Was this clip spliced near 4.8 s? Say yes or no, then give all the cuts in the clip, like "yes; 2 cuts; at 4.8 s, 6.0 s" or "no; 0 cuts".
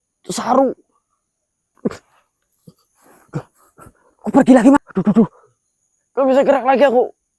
yes; 1 cut; at 4.8 s